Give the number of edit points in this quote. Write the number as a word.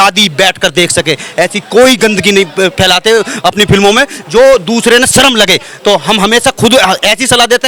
zero